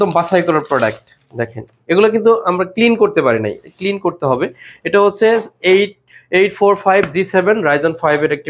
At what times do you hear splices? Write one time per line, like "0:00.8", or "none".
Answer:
none